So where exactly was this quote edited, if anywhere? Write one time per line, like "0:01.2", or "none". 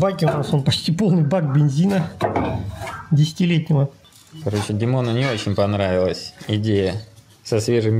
0:04.0